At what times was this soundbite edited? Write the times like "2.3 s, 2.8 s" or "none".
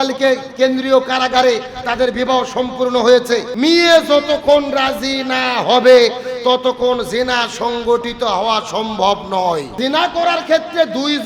3.5 s, 9.7 s